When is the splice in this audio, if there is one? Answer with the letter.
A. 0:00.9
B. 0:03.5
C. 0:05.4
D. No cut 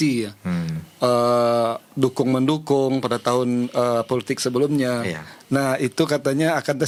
D